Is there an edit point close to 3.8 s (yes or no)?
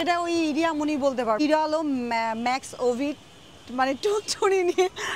no